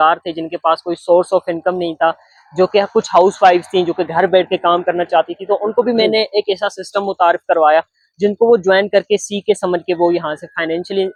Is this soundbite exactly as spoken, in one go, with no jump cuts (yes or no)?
yes